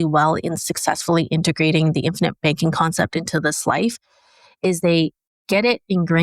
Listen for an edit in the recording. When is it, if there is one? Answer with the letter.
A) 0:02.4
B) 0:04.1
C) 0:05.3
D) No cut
C